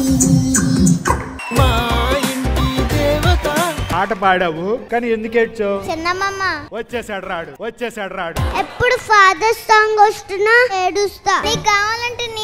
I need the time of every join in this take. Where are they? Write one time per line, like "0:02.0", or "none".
none